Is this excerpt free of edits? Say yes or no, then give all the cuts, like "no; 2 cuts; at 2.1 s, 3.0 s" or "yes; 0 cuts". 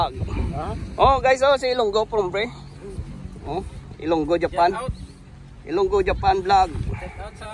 yes; 0 cuts